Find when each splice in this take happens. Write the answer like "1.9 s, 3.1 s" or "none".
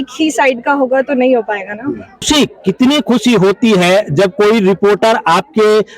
2.2 s